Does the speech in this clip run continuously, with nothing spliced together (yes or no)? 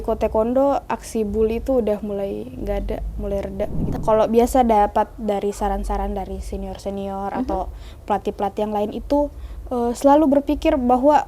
no